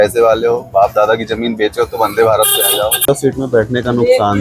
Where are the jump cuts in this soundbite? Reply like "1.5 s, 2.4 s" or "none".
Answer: 3.0 s